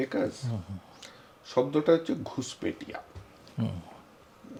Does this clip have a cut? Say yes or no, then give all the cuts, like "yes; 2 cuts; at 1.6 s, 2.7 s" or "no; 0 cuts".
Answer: no; 0 cuts